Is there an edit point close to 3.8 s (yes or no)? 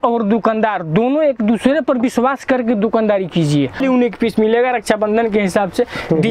yes